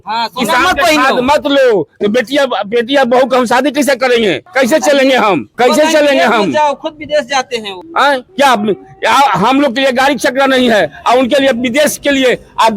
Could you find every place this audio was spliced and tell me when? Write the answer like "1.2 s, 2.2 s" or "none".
4.4 s, 5.5 s, 8.0 s